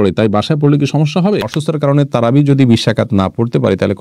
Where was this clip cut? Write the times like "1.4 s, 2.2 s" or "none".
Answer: 1.5 s